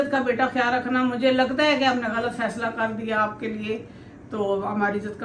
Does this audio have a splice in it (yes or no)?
no